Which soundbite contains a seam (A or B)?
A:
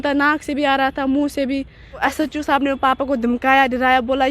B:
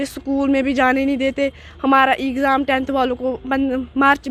A